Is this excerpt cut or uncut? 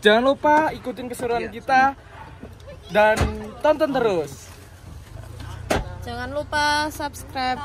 uncut